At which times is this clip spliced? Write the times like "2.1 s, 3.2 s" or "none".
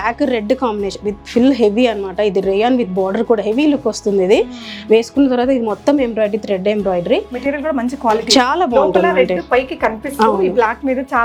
none